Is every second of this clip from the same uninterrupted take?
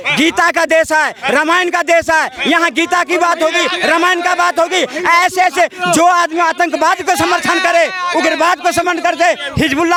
yes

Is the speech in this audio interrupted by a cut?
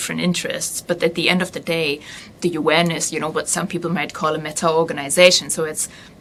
no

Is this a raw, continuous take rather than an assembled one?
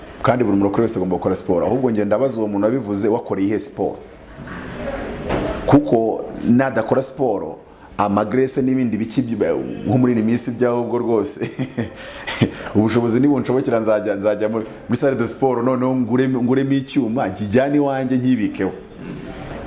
yes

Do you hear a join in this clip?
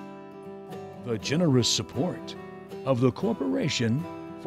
yes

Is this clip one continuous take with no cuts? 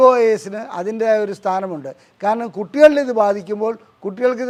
yes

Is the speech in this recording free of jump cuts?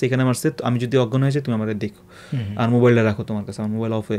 yes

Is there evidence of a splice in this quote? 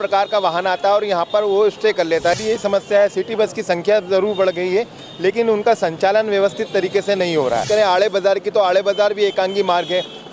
yes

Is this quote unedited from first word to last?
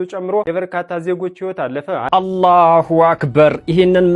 no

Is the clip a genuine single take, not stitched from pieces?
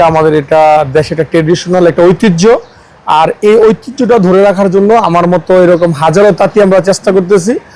yes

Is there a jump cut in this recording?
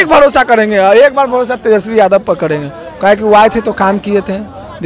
no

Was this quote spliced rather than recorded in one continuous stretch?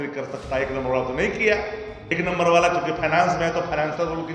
yes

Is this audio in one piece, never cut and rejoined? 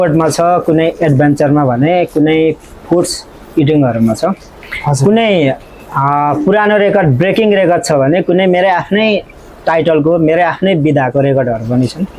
yes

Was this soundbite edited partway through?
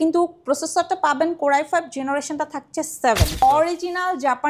yes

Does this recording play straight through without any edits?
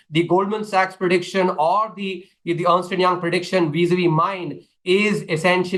yes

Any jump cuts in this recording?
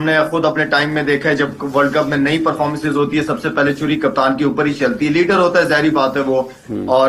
no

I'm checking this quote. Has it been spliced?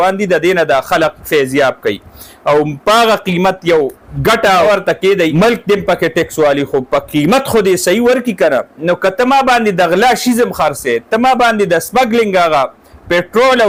no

